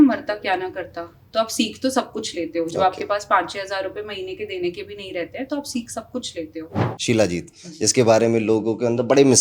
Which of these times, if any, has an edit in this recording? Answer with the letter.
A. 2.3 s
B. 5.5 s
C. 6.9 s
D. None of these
C